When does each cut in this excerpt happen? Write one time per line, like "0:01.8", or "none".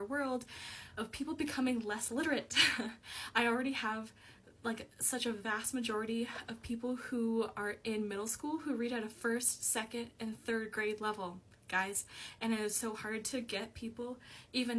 none